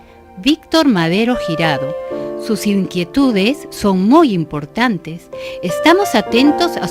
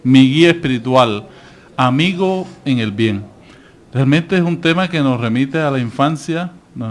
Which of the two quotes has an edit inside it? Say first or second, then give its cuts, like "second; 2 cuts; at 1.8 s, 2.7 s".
second; 1 cut; at 5.2 s